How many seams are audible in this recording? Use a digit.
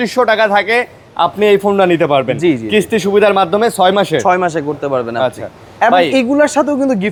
0